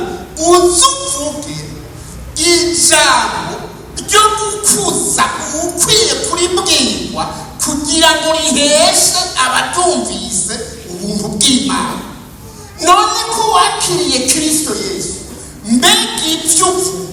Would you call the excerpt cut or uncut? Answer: uncut